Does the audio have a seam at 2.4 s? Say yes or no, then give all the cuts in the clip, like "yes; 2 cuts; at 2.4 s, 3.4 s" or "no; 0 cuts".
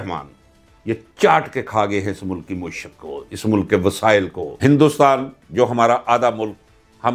no; 1 cut; at 4.4 s